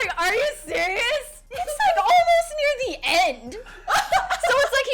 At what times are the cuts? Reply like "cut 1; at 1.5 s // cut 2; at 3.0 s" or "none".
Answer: cut 1; at 1.3 s